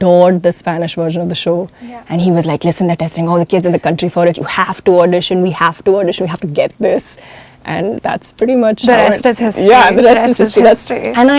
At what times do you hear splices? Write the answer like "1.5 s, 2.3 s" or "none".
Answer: none